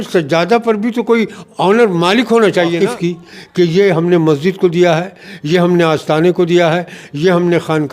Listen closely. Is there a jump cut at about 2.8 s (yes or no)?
yes